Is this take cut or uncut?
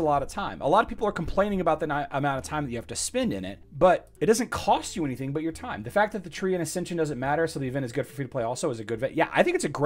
cut